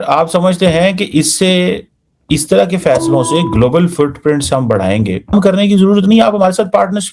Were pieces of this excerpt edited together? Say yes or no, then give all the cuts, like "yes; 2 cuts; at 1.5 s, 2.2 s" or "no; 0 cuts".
yes; 1 cut; at 5.3 s